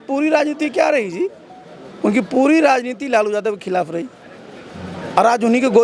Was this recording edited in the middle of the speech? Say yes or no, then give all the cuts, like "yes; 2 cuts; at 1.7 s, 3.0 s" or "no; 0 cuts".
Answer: no; 0 cuts